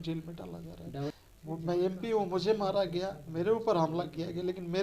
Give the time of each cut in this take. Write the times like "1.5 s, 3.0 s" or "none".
1.1 s